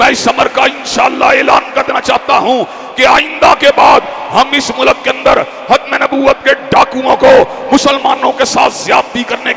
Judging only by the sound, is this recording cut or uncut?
uncut